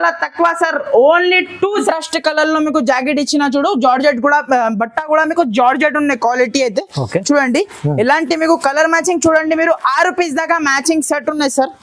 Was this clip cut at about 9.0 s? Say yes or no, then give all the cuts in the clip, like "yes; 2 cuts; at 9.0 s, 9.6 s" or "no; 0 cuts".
no; 1 cut; at 1.8 s